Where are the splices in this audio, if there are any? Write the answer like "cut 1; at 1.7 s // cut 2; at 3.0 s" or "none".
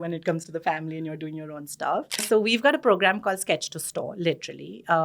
cut 1; at 2.2 s

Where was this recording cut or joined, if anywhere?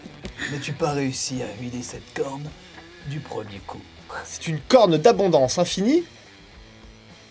cut 1; at 4.1 s

